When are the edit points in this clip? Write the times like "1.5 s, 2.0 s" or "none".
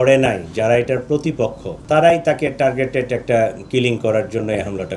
1.7 s

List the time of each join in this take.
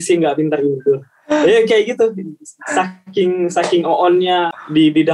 none

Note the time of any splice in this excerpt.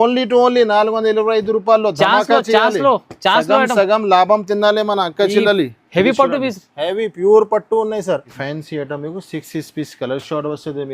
8.3 s

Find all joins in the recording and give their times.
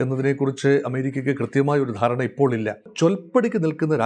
2.9 s

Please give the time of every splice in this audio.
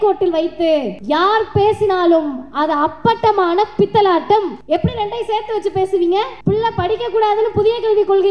0.9 s, 4.6 s, 6.3 s

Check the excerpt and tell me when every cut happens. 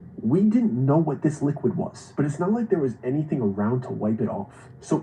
2.6 s

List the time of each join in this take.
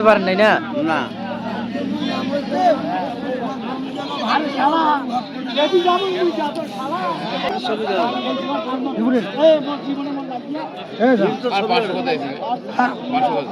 7.5 s

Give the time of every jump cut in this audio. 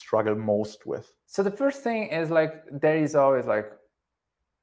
1.2 s

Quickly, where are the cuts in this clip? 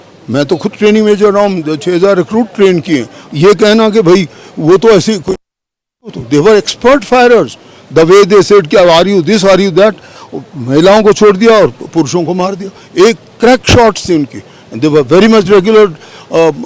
none

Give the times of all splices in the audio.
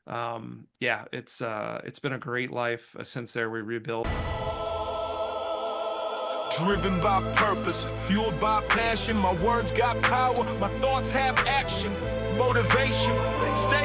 4.1 s

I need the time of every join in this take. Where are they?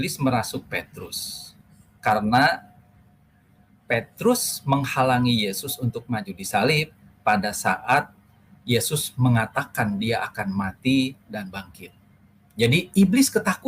none

